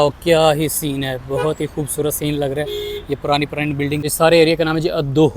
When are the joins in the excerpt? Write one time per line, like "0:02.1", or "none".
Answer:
0:04.0